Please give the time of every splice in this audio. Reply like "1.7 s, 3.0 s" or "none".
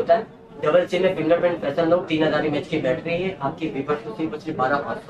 none